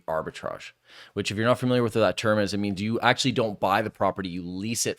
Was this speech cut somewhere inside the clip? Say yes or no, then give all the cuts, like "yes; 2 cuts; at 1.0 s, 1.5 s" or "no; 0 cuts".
no; 0 cuts